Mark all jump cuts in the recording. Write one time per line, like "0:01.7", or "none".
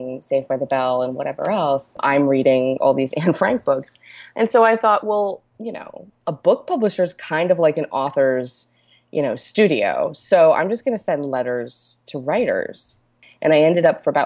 0:02.0
0:13.2